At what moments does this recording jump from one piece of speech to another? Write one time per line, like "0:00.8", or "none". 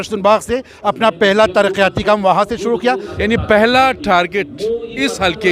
0:03.1